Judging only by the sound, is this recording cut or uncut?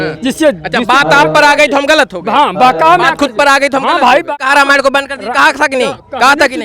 cut